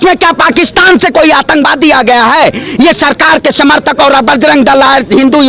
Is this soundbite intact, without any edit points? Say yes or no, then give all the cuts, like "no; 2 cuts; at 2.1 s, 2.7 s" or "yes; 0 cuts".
yes; 0 cuts